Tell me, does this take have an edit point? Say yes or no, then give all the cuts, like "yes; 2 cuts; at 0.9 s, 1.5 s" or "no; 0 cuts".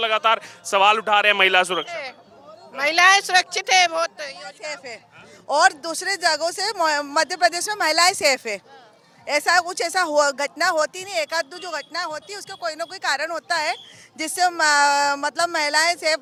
no; 0 cuts